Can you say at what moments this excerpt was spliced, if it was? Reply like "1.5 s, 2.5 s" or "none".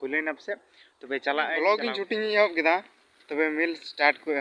1.5 s